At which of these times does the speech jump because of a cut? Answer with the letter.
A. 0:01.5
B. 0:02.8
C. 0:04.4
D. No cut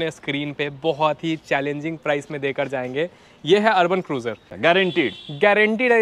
C